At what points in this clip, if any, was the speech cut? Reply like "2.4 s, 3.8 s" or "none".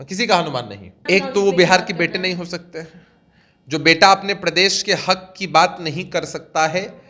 1.1 s